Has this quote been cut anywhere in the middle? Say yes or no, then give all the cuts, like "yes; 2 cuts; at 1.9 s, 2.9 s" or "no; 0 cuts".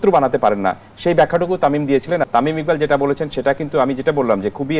yes; 1 cut; at 2.3 s